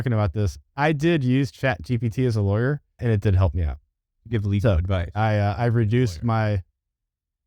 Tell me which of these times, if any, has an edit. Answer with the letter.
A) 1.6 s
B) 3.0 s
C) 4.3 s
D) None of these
B